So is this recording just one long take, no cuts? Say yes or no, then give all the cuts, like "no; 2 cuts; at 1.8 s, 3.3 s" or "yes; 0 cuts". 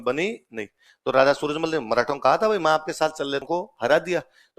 no; 1 cut; at 3.5 s